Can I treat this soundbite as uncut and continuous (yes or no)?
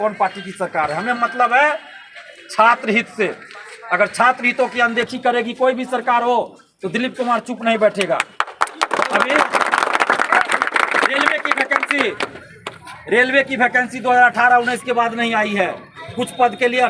yes